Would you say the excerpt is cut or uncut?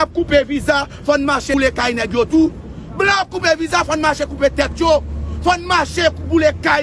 cut